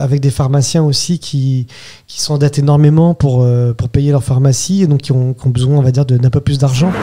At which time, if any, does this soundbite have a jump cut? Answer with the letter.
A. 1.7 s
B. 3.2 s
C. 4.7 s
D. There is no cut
D